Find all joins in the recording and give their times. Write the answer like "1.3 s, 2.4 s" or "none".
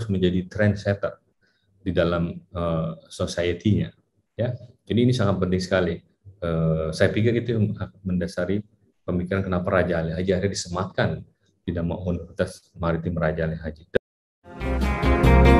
14.0 s